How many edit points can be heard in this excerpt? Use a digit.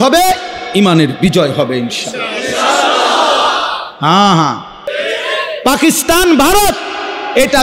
1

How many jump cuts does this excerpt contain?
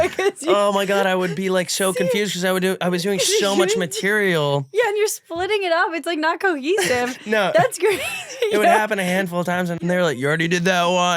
1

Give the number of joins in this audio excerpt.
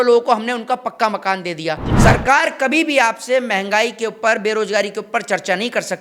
1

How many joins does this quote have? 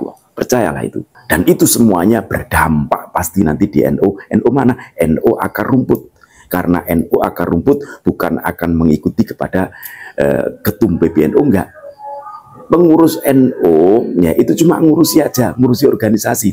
1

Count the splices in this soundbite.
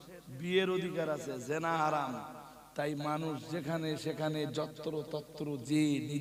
0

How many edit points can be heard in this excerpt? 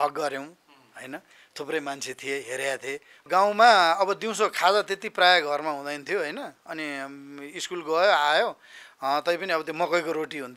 1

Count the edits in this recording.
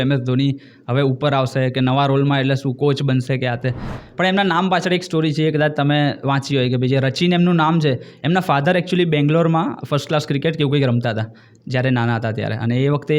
1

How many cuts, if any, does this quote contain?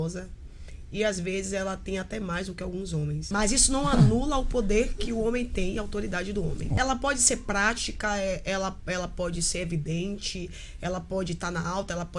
2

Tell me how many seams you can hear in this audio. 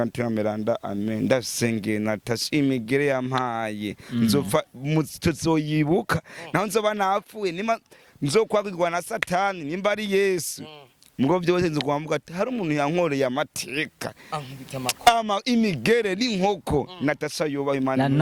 0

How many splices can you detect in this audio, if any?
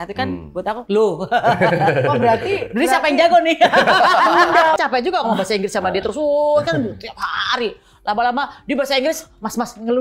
1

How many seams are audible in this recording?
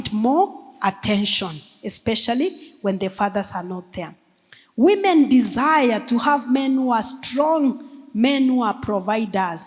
0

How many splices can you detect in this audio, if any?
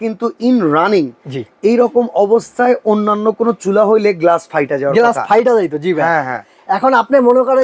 0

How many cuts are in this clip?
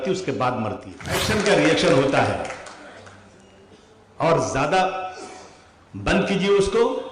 1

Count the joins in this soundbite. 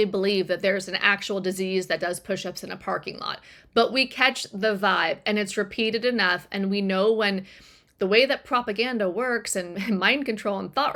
0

